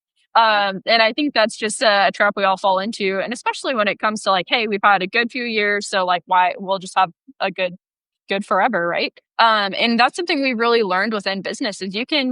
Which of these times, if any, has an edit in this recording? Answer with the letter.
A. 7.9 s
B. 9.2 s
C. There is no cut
B